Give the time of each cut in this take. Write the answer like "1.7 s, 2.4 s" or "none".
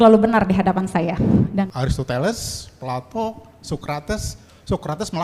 1.7 s

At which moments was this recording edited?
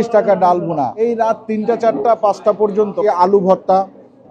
0.9 s, 3.0 s

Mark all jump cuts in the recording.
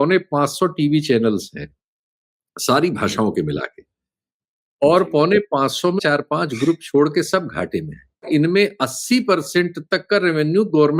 6.0 s, 8.3 s

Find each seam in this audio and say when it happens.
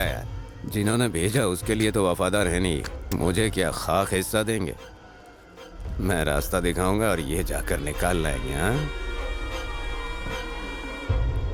none

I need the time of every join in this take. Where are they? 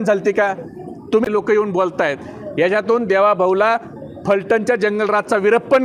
1.3 s

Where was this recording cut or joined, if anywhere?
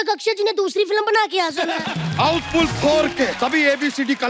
1.8 s, 3.3 s

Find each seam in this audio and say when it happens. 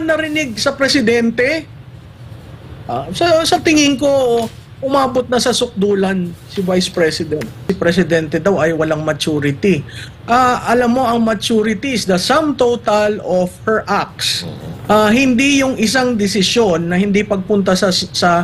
7.7 s

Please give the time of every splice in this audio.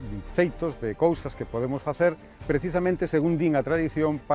none

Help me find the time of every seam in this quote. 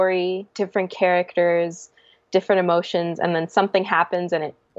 none

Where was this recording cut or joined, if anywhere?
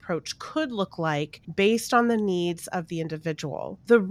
1.4 s

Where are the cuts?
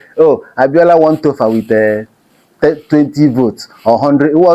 none

